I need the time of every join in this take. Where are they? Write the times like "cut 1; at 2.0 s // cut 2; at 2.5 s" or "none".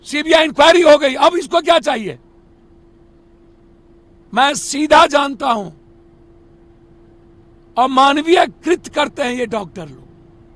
none